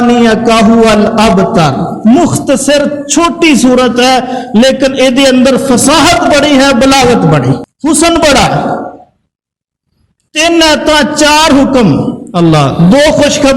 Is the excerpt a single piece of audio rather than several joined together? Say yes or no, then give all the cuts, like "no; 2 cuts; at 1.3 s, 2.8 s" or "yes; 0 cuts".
no; 1 cut; at 7.7 s